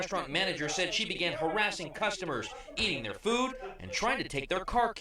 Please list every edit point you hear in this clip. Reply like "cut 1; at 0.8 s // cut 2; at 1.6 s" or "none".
cut 1; at 3.5 s